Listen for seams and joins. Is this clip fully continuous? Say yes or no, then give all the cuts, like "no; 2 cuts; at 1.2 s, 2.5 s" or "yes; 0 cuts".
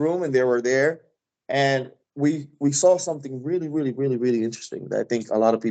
yes; 0 cuts